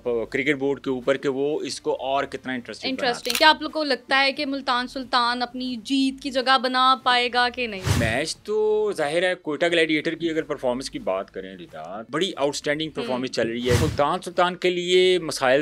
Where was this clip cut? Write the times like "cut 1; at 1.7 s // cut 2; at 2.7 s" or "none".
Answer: cut 1; at 3.3 s // cut 2; at 8.0 s // cut 3; at 12.0 s // cut 4; at 13.8 s